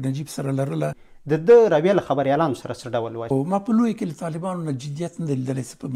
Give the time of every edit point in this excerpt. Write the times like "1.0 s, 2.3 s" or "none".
1.1 s, 3.2 s